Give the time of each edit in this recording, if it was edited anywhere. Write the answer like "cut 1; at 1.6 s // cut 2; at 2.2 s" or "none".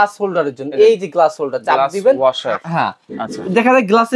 none